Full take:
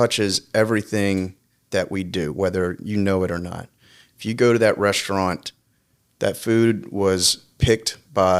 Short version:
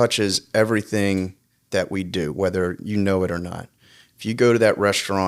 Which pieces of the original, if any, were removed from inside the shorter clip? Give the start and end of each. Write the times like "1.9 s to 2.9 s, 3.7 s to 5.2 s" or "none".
none